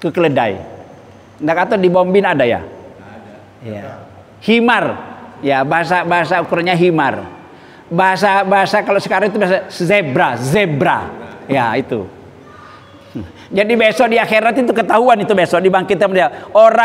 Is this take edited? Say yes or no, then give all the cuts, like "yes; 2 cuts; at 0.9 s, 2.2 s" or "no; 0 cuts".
no; 0 cuts